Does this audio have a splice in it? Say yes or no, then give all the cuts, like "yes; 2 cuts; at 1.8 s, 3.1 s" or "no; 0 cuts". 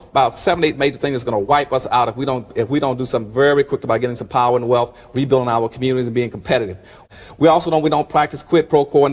yes; 1 cut; at 7.0 s